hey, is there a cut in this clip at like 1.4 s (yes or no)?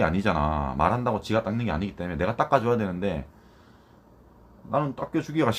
no